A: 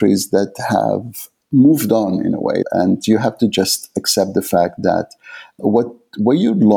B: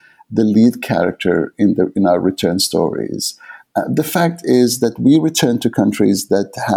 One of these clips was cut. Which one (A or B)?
A